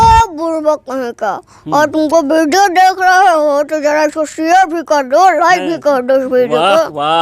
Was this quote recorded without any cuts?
yes; 0 cuts

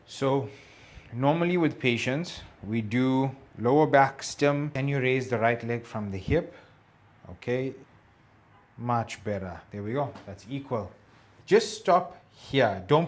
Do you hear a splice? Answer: yes; 3 cuts; at 4.8 s, 7.9 s, 11.3 s

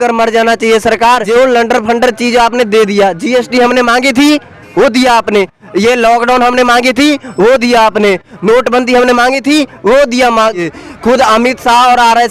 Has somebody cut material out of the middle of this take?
yes; 2 cuts; at 1.2 s, 10.7 s

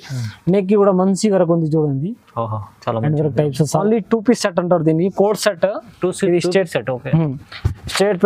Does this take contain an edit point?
yes; 1 cut; at 3.8 s

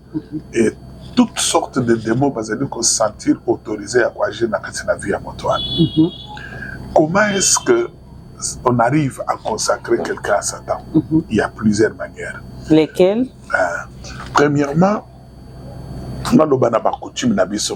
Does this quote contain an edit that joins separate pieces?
no; 0 cuts

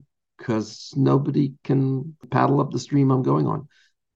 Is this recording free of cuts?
no; 1 cut; at 2.3 s

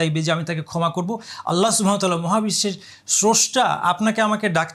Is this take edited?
no; 0 cuts

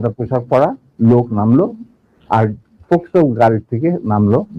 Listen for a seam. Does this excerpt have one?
no; 0 cuts

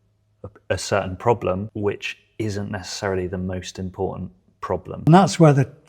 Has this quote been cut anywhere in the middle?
yes; 2 cuts; at 1.7 s, 5.1 s

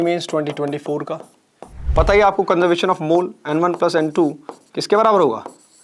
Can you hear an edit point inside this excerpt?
yes; 1 cut; at 1.8 s

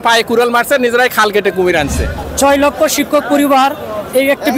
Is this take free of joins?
no; 1 cut; at 2.2 s

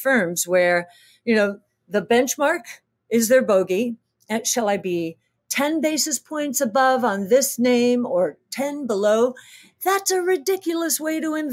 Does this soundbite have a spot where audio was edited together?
no; 0 cuts

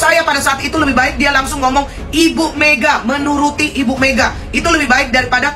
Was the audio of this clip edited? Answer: no; 0 cuts

